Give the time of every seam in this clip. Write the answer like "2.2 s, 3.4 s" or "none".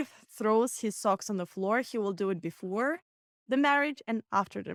none

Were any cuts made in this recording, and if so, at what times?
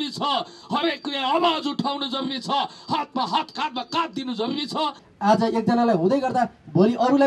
5.0 s

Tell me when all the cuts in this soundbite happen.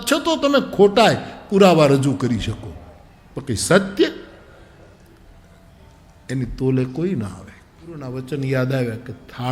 8.0 s

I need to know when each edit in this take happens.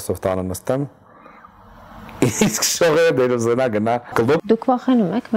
4.4 s

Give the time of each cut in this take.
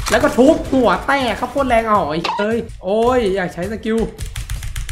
2.7 s

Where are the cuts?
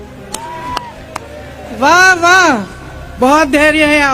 3.2 s

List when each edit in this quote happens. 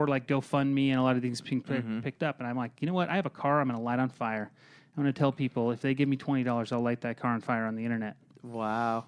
none

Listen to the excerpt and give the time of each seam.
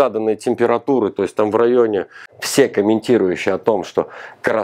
2.2 s

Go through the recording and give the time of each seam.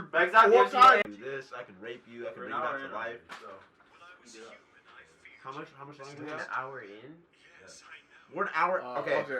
1.0 s

